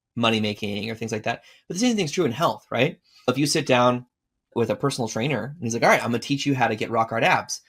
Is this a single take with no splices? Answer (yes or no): no